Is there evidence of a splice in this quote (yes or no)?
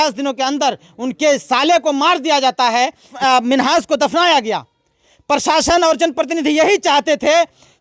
yes